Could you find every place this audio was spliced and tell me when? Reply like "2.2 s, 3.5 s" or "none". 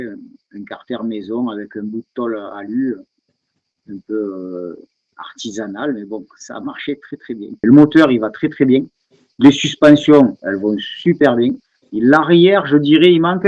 7.5 s